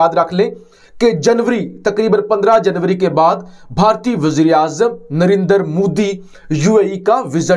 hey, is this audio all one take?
yes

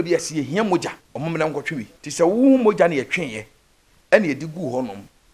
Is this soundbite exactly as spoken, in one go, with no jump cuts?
no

